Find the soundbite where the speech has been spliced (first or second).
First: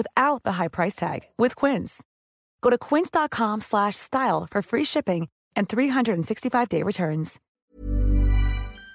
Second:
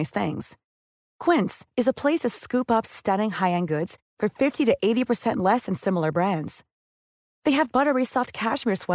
first